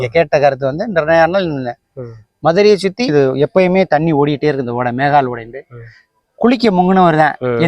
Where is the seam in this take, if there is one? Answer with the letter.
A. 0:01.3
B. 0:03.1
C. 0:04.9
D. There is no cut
B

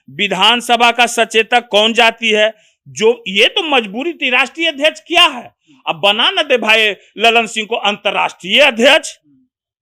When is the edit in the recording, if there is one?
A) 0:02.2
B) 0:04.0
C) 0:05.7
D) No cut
D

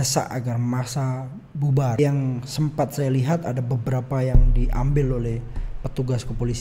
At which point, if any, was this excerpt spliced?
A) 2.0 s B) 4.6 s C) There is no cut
A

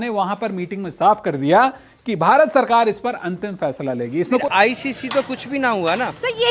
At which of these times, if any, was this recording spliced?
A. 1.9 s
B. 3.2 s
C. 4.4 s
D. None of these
C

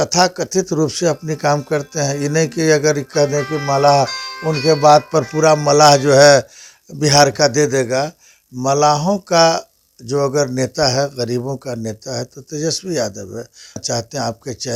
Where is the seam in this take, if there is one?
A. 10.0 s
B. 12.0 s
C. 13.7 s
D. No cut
D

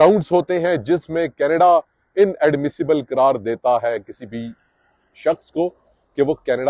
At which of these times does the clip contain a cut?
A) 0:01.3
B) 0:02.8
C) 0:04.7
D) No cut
D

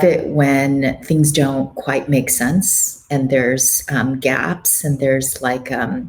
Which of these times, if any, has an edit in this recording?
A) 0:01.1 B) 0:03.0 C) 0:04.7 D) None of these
D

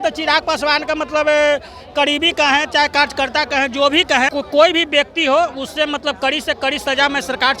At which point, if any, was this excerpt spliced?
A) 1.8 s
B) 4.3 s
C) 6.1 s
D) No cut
B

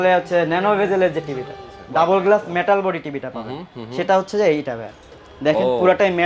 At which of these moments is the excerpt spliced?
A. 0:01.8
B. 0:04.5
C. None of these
A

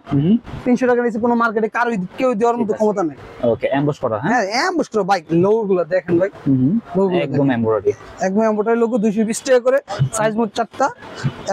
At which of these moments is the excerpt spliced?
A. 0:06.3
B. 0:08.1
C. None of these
C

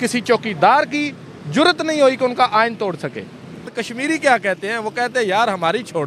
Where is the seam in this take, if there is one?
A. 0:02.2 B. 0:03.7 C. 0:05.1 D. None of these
B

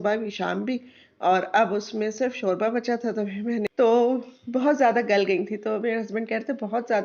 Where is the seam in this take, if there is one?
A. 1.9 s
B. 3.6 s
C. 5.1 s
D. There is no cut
B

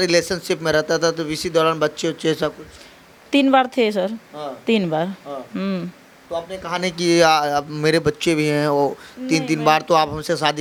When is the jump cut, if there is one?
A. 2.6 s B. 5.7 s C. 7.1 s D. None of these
D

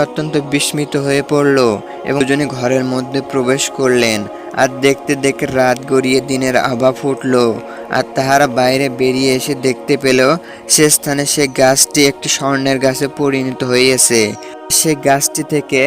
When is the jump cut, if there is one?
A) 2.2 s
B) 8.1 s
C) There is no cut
A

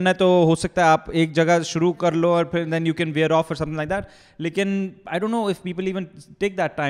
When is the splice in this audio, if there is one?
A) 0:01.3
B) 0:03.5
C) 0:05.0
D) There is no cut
D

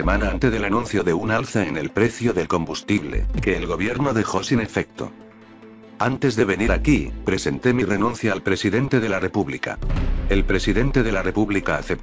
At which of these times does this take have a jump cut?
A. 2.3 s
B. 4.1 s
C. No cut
B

